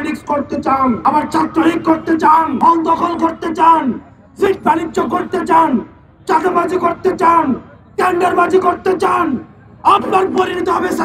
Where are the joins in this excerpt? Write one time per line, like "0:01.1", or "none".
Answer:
0:01.0
0:02.5